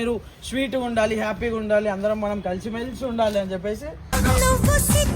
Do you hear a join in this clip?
no; 0 cuts

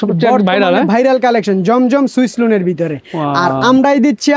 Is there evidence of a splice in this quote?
no; 0 cuts

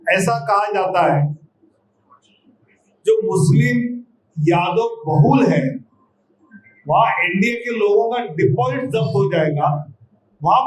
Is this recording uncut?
yes; 0 cuts

